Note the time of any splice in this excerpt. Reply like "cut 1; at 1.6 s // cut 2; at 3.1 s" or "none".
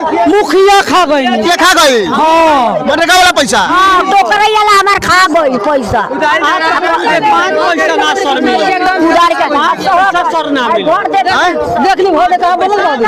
none